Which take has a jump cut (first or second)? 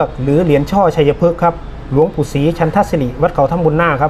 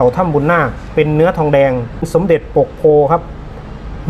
second